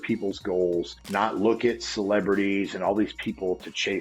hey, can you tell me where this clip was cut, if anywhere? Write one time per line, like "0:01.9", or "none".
0:01.0